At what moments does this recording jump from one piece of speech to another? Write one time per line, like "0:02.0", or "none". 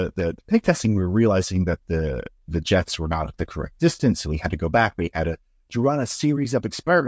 none